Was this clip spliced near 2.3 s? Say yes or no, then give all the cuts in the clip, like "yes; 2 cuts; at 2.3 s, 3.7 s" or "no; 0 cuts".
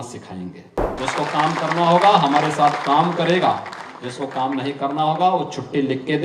no; 1 cut; at 1.0 s